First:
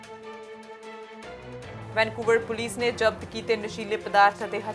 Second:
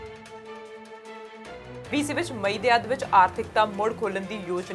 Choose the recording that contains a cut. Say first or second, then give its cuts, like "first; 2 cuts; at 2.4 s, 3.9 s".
first; 1 cut; at 1.6 s